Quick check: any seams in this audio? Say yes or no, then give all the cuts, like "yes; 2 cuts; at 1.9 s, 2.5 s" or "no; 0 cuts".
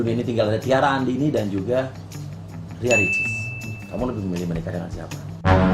no; 0 cuts